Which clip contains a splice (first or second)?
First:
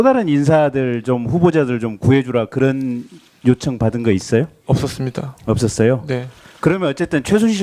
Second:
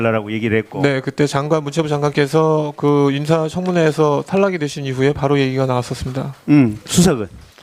first